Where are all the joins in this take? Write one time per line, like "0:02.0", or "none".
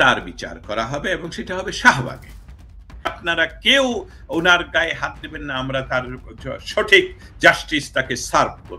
0:03.2